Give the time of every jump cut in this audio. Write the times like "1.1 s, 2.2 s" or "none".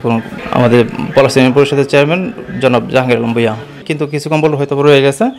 3.8 s